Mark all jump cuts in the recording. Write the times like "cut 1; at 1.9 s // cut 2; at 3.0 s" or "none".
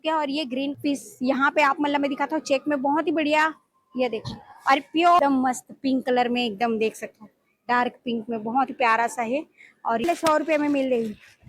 cut 1; at 0.8 s // cut 2; at 5.2 s // cut 3; at 10.0 s

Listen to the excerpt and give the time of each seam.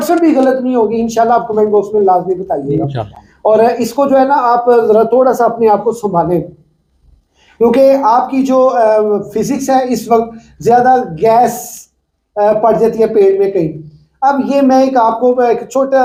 none

